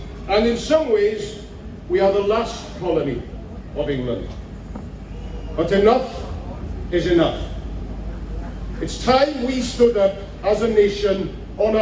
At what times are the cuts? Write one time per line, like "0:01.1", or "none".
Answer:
none

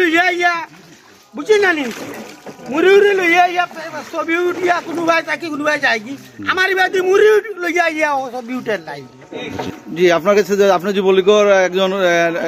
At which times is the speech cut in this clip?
0:09.8

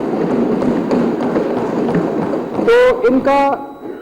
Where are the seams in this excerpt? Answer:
none

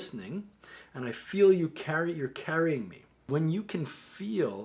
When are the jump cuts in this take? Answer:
0:03.2

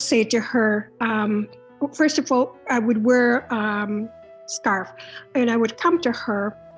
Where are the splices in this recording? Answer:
0:00.9

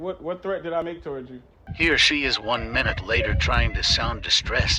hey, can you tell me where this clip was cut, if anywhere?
0:01.6

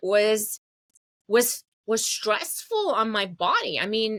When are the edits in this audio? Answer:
none

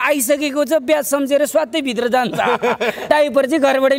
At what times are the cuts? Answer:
0:03.1

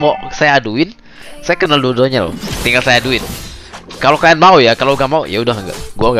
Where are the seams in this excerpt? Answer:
none

